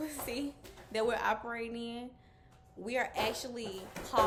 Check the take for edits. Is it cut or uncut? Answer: uncut